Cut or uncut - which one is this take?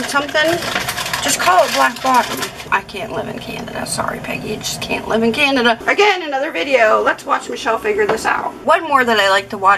cut